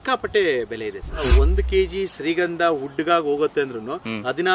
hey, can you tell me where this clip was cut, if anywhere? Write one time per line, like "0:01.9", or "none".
0:01.2